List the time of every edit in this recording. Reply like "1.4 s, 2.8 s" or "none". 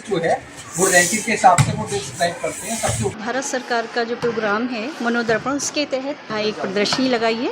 3.1 s, 6.3 s